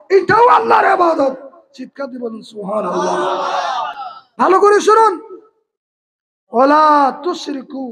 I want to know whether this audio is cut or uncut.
uncut